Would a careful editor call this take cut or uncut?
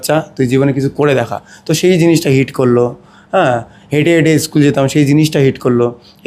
uncut